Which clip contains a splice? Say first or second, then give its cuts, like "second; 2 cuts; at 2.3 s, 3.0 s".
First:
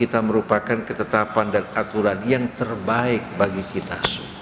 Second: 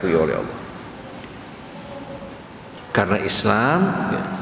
second; 1 cut; at 2.8 s